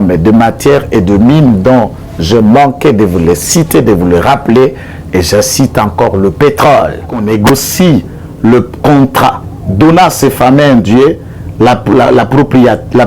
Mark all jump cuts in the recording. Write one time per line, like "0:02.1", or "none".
0:07.2